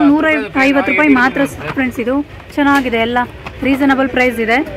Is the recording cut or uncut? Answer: uncut